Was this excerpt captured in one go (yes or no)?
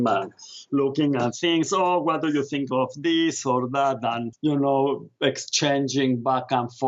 yes